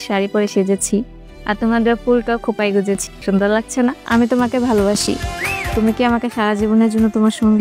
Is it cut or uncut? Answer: cut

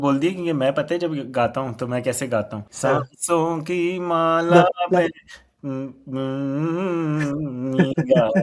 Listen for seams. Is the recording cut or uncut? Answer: cut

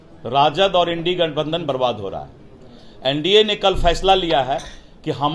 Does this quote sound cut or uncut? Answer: uncut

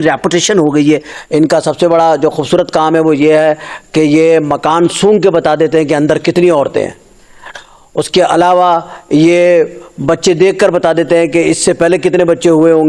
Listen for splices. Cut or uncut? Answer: cut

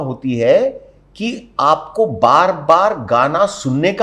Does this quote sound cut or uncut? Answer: uncut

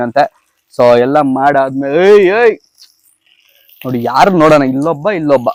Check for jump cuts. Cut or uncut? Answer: uncut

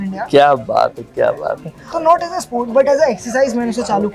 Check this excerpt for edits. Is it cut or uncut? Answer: cut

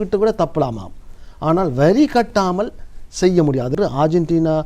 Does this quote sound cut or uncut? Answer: cut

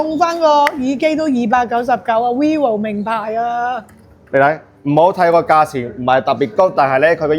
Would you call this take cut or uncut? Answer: uncut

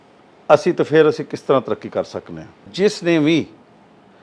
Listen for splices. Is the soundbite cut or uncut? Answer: cut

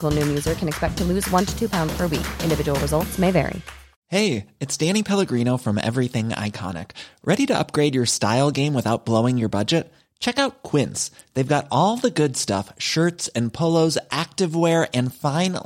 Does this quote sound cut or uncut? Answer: cut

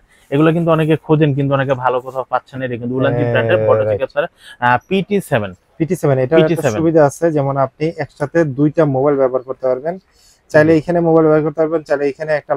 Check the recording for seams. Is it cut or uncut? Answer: uncut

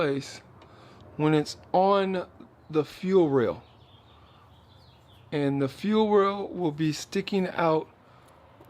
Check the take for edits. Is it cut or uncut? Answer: uncut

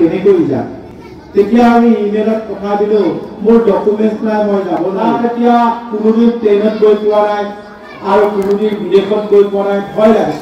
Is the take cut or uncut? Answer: cut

